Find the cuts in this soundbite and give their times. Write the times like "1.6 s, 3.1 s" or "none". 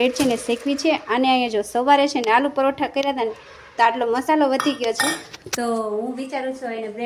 none